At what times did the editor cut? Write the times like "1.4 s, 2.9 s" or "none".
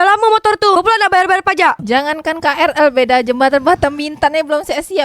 1.8 s